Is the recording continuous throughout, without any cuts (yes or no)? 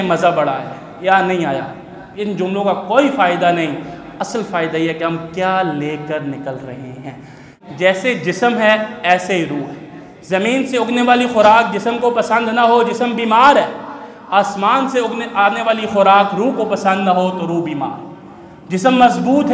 no